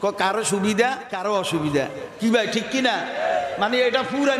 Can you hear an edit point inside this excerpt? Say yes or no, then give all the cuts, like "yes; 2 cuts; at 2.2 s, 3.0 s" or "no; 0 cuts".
yes; 1 cut; at 1.1 s